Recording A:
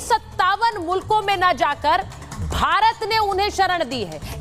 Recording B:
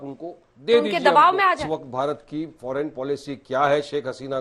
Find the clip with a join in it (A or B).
B